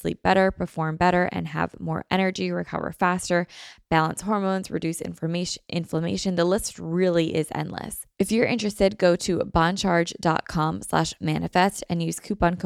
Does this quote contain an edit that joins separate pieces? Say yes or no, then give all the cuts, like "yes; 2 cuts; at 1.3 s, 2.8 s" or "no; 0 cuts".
yes; 1 cut; at 8.0 s